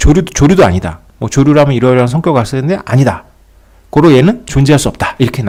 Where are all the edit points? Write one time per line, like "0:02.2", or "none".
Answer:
none